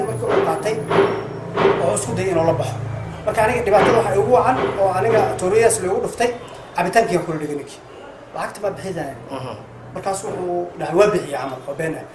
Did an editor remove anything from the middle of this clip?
no; 0 cuts

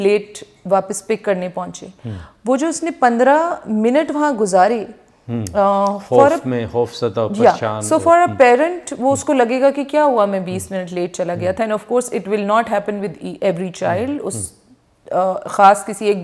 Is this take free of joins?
yes; 0 cuts

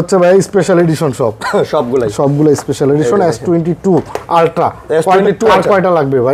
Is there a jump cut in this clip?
no; 0 cuts

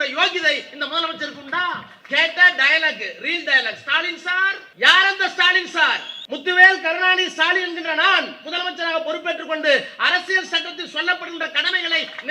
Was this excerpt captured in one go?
no; 3 cuts; at 1.9 s, 4.6 s, 6.1 s

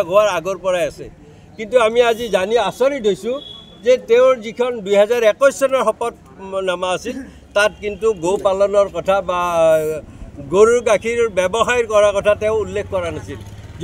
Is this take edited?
no; 0 cuts

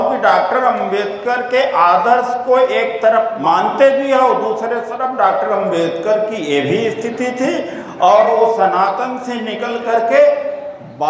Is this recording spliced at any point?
yes; 1 cut; at 3.3 s

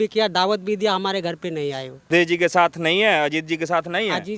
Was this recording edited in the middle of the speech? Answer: yes; 1 cut; at 2.1 s

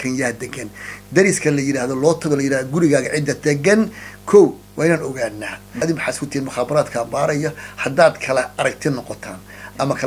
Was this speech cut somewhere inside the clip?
yes; 1 cut; at 5.8 s

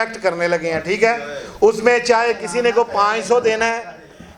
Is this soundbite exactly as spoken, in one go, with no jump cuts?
yes; 0 cuts

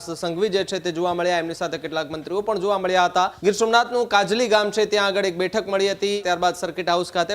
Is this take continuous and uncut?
no; 2 cuts; at 3.4 s, 6.2 s

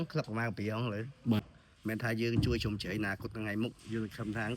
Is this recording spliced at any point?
yes; 1 cut; at 1.4 s

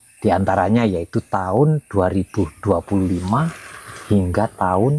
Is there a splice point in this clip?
no; 0 cuts

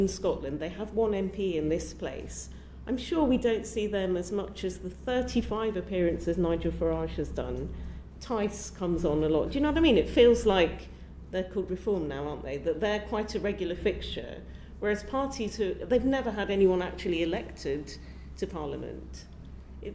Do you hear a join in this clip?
no; 0 cuts

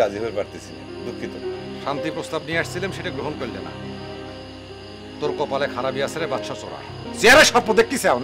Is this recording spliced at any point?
yes; 1 cut; at 7.0 s

